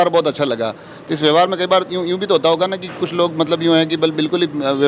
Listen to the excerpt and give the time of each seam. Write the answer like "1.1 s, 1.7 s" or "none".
none